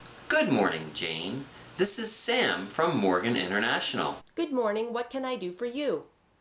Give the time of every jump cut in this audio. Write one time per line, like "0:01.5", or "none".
0:04.2